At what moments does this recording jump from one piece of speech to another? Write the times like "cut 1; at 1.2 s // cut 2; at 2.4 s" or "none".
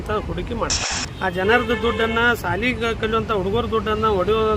cut 1; at 1.0 s